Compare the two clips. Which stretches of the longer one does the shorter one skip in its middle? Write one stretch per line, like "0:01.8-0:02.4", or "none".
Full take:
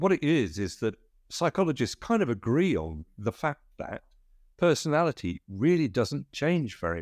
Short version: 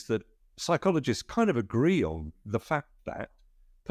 none